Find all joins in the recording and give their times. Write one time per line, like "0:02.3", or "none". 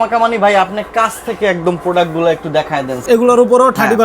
0:03.0